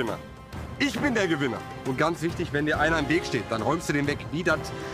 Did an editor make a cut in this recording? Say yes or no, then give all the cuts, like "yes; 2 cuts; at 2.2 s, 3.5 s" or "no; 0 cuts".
no; 0 cuts